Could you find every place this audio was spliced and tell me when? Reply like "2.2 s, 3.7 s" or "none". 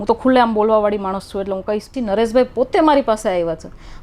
1.9 s